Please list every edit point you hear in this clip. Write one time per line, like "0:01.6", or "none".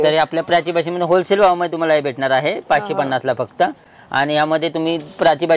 none